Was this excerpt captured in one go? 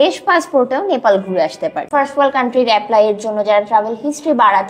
no; 1 cut; at 1.8 s

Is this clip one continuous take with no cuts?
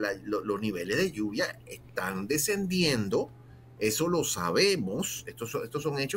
yes; 0 cuts

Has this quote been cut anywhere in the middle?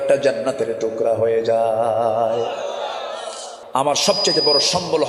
yes; 1 cut; at 3.5 s

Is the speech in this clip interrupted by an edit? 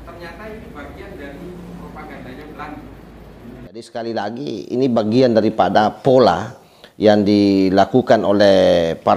yes; 1 cut; at 3.8 s

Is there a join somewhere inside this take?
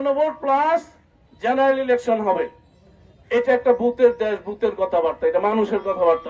no; 0 cuts

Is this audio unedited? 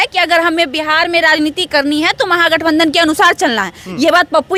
yes; 0 cuts

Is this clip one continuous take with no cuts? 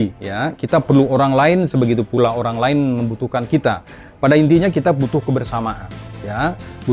yes; 0 cuts

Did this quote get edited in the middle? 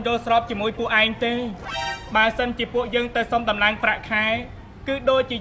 no; 0 cuts

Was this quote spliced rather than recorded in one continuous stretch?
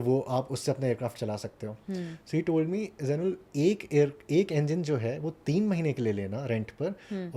no; 0 cuts

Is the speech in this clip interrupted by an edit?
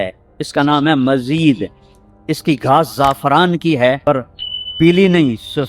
yes; 1 cut; at 4.3 s

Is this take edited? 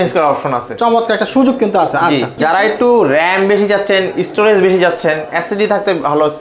yes; 1 cut; at 2.4 s

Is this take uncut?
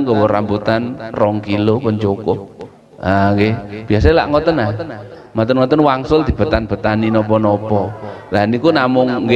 yes; 0 cuts

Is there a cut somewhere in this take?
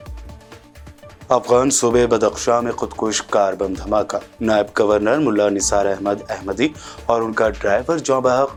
no; 0 cuts

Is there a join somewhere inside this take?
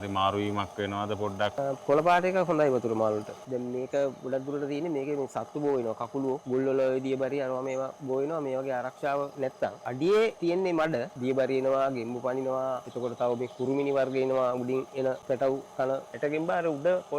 yes; 8 cuts; at 1.6 s, 3.4 s, 6.4 s, 9.8 s, 10.9 s, 12.9 s, 15.2 s, 16.1 s

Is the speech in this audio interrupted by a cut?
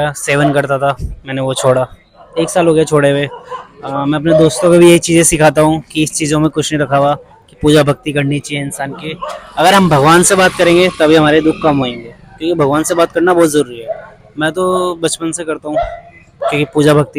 no; 0 cuts

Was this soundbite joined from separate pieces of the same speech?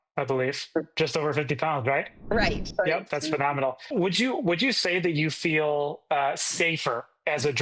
no; 0 cuts

